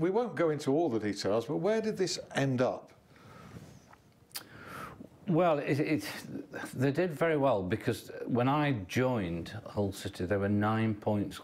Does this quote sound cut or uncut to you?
uncut